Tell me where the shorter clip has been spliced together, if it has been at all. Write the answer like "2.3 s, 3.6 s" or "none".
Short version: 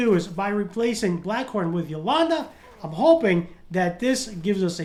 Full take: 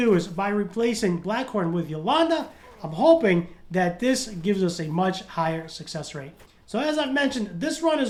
none